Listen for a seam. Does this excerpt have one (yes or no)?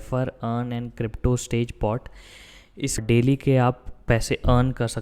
yes